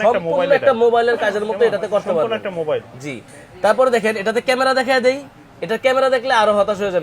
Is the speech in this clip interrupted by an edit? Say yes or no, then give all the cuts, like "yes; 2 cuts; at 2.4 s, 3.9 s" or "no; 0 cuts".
no; 0 cuts